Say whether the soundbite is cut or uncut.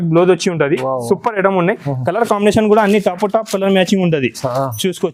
uncut